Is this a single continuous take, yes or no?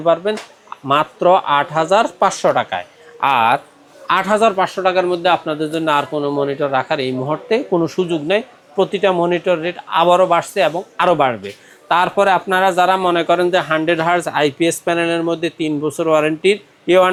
yes